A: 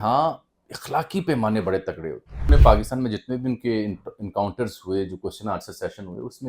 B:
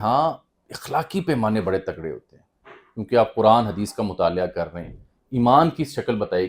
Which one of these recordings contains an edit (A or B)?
A